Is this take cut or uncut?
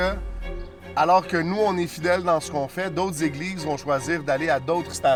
uncut